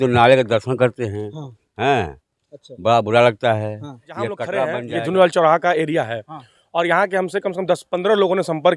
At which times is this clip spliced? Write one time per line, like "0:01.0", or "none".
0:04.8